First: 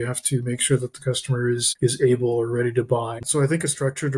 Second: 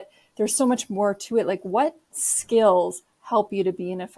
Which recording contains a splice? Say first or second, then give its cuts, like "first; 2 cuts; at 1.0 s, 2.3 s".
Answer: first; 2 cuts; at 1.7 s, 3.2 s